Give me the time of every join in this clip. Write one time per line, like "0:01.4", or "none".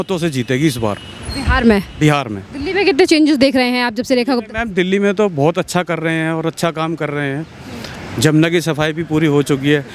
none